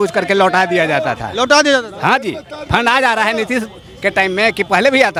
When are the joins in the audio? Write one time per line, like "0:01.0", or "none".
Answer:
none